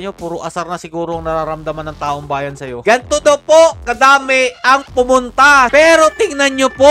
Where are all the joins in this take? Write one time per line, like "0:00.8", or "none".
0:02.8
0:05.7